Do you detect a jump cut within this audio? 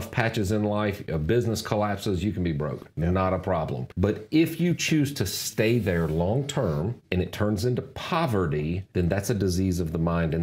yes; 3 cuts; at 3.8 s, 7.0 s, 8.8 s

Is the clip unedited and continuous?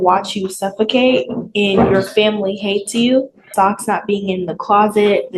no; 1 cut; at 3.5 s

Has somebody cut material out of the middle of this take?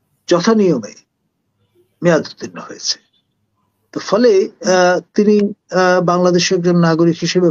no; 0 cuts

